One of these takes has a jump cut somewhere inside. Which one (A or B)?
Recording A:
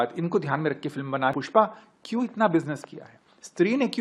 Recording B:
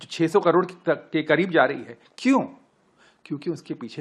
A